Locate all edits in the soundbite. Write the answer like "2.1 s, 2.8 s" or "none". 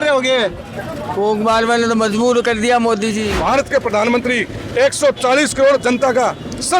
3.3 s

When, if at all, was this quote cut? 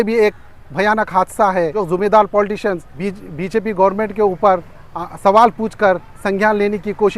1.8 s, 2.9 s

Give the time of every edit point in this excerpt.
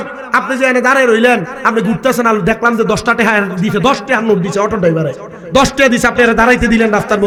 none

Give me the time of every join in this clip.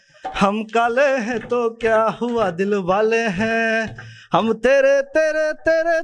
none

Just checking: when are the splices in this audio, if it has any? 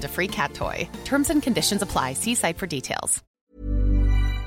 3.2 s

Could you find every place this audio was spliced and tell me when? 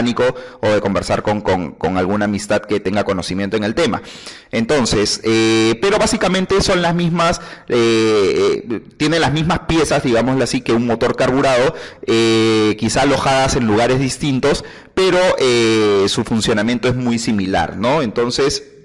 12.7 s

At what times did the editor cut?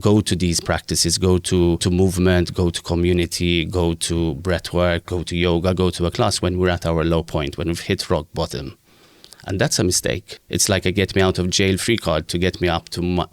1.8 s, 10.3 s

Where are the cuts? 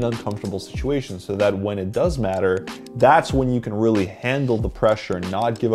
2.8 s

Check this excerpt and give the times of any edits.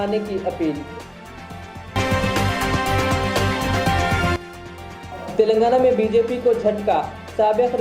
none

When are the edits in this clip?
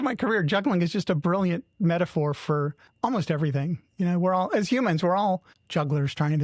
2.8 s, 5.6 s

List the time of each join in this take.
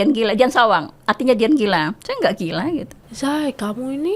3.0 s

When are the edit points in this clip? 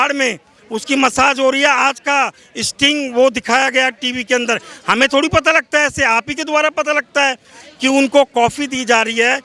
none

